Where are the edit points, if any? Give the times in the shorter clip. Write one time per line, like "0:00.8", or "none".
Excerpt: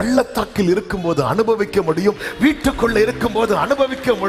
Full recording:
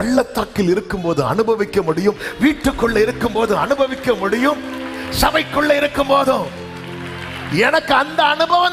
none